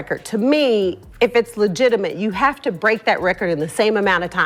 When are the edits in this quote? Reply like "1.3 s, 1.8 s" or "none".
none